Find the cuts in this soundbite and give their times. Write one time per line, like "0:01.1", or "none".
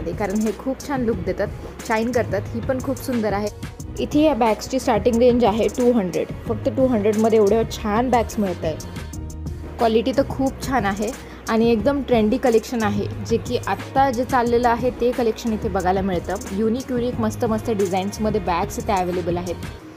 none